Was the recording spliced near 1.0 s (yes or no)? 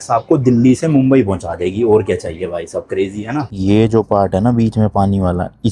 no